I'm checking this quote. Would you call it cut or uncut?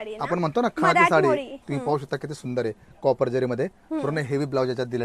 cut